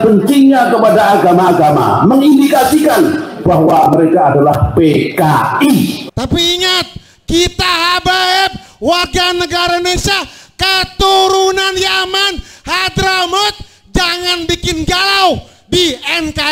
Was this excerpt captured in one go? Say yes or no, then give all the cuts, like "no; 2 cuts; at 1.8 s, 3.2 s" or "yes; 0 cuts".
no; 1 cut; at 6.0 s